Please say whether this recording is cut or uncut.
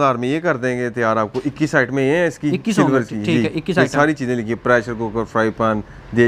uncut